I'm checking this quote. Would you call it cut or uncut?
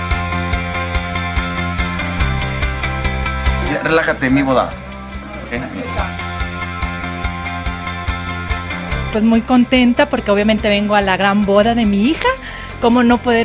cut